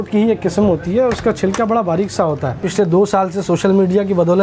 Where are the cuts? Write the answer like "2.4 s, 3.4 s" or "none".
2.7 s

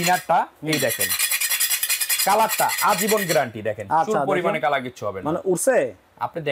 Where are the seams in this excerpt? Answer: none

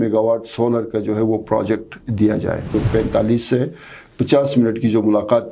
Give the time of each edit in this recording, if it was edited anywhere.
2.7 s

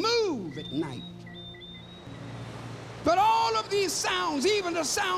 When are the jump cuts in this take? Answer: 2.1 s

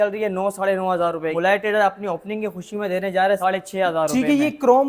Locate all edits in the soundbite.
1.3 s

